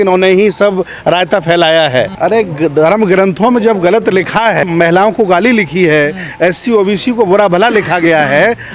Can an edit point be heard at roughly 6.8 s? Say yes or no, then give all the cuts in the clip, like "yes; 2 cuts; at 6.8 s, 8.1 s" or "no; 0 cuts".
no; 2 cuts; at 2.1 s, 4.7 s